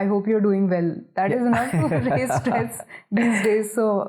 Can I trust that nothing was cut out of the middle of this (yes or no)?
yes